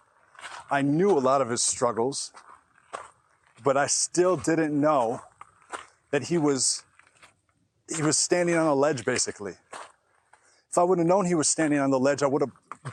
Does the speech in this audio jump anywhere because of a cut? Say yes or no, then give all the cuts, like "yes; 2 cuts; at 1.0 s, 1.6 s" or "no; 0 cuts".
no; 0 cuts